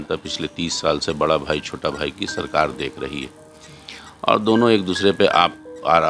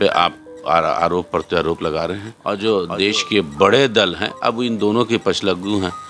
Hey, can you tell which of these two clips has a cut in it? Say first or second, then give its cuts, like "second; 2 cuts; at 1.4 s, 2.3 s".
second; 1 cut; at 2.3 s